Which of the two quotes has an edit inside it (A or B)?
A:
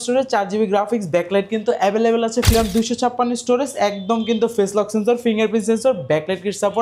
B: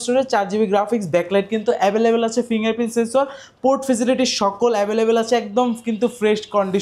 A